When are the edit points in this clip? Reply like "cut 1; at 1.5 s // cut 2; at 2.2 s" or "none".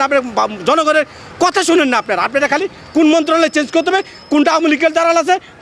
none